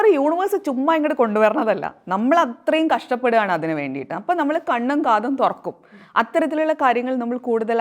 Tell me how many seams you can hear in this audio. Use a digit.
0